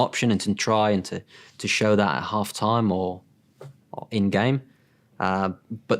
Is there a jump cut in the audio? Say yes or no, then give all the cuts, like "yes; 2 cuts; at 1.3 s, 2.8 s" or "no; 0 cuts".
no; 0 cuts